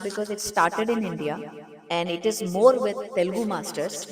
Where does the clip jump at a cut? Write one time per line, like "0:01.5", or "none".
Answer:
none